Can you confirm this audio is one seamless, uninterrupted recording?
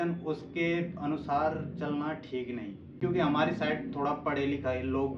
no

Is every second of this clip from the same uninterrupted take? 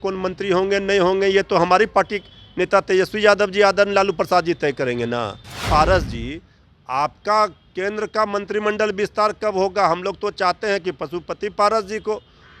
no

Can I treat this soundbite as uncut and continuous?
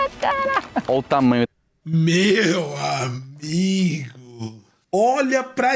no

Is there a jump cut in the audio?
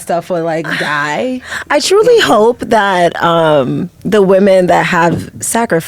no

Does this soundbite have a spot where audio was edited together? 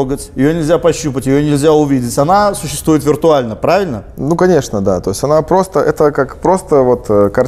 no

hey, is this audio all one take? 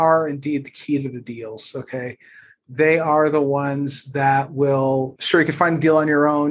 no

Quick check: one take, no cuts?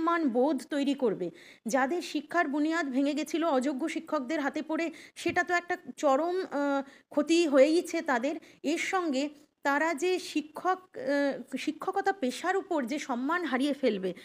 yes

